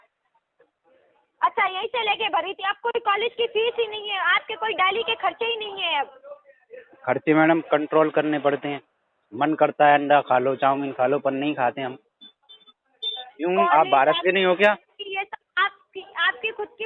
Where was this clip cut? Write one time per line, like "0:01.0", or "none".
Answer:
0:13.2